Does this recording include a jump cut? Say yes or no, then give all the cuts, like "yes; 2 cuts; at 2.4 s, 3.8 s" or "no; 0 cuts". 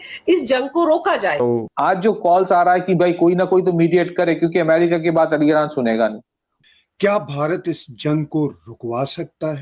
yes; 2 cuts; at 1.4 s, 6.7 s